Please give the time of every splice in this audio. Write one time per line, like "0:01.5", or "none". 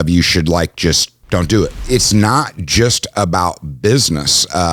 0:01.8